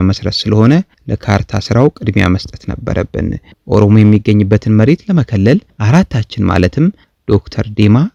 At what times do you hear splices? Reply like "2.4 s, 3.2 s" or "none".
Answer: none